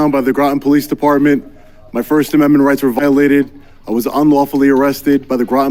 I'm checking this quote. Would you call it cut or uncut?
uncut